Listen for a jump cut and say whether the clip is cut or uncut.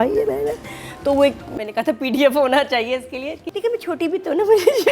cut